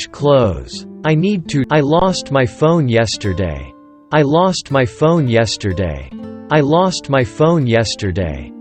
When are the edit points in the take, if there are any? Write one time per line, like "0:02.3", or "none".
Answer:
none